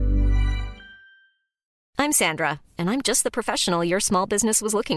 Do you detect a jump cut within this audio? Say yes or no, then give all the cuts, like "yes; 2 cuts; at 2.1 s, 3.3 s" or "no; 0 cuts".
yes; 1 cut; at 1.8 s